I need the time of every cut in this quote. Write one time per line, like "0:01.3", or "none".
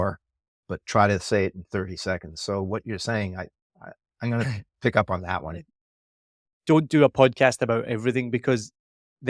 0:06.0